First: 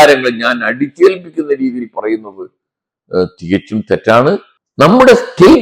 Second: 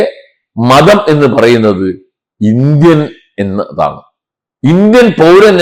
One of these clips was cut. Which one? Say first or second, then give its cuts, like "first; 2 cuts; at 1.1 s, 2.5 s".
first; 1 cut; at 4.6 s